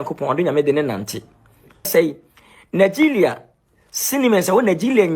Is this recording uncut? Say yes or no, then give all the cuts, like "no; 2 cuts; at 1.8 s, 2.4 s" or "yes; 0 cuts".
no; 1 cut; at 1.9 s